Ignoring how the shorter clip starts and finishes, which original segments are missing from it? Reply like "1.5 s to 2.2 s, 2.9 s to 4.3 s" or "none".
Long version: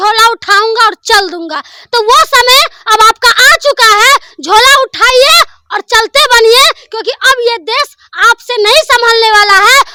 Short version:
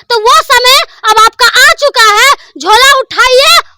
none